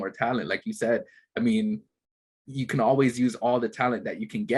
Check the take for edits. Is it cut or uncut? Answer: uncut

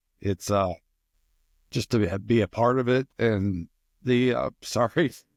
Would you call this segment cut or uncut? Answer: uncut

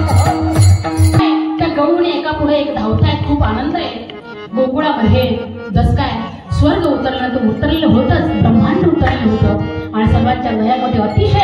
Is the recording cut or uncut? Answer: cut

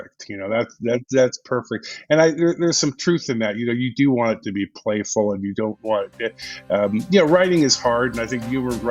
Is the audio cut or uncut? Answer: uncut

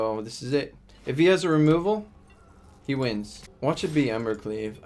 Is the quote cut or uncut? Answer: cut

